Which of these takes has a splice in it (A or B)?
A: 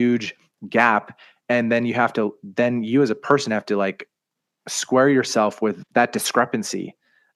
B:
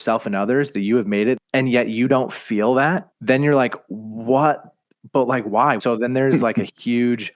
B